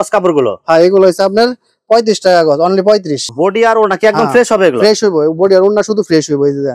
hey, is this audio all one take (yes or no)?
no